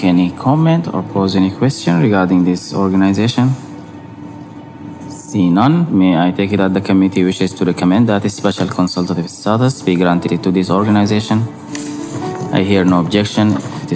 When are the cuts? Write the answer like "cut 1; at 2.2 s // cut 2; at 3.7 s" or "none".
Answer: none